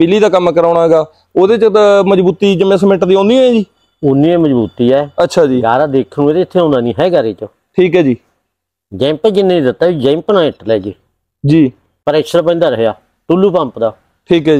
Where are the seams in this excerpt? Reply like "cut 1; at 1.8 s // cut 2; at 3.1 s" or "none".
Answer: none